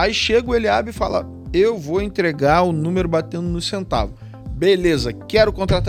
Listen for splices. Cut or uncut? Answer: uncut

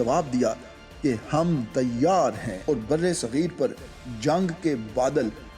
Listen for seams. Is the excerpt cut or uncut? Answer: cut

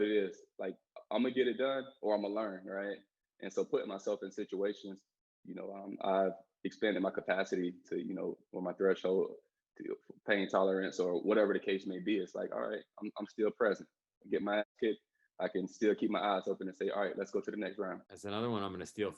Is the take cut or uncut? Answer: cut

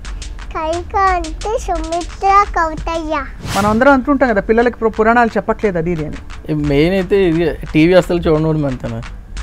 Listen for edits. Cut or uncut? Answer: cut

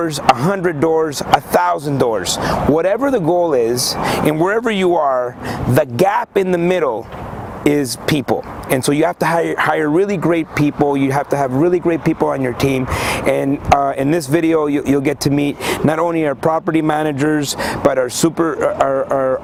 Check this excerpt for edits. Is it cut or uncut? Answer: uncut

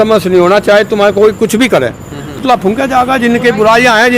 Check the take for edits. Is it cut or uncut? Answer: cut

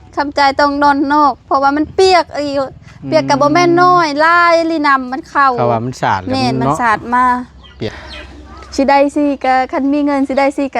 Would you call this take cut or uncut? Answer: cut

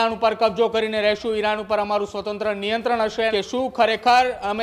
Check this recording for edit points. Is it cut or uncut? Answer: cut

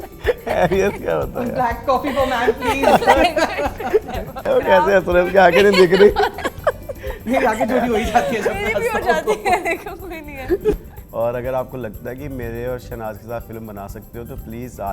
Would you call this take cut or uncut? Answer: cut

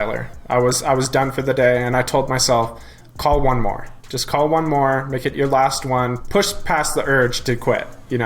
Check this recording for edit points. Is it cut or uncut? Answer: cut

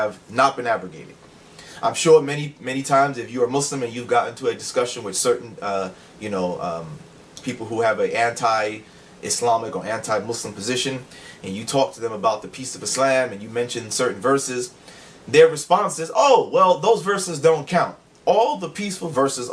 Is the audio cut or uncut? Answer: cut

